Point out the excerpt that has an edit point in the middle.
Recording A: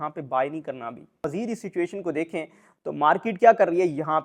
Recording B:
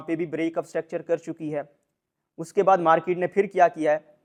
A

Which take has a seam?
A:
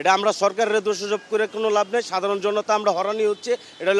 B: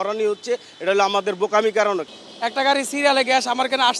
B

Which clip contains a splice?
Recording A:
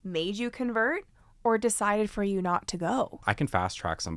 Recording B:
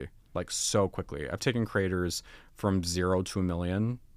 A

